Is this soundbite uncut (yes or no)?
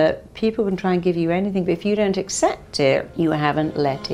no